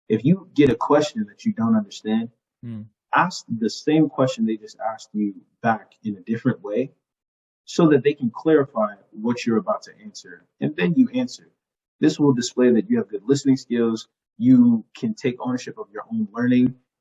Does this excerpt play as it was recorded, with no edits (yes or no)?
yes